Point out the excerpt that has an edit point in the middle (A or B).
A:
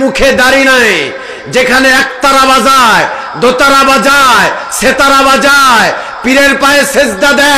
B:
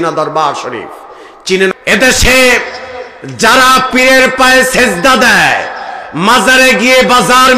B